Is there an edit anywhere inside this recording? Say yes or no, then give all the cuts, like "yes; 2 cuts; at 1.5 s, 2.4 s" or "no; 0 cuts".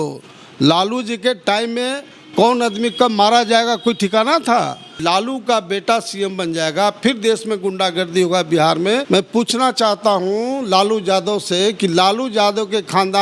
yes; 2 cuts; at 5.0 s, 9.0 s